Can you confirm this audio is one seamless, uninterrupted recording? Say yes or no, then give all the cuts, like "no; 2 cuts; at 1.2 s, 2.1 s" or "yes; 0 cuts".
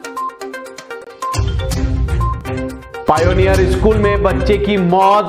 no; 2 cuts; at 1.1 s, 2.4 s